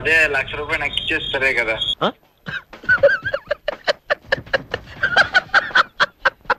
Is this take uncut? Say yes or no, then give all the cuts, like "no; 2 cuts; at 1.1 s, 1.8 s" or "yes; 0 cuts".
yes; 0 cuts